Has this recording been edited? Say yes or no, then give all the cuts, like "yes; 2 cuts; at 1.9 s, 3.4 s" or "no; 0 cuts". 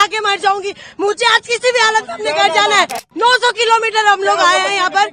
yes; 1 cut; at 3.1 s